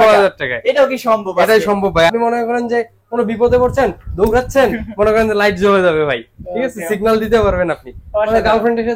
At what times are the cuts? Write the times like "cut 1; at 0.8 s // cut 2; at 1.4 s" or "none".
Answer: cut 1; at 2.1 s